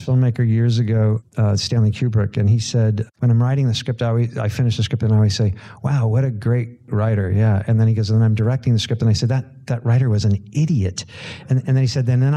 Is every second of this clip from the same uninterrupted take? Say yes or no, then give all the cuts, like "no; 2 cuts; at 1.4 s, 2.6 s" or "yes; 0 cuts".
no; 3 cuts; at 1.2 s, 3.1 s, 6.9 s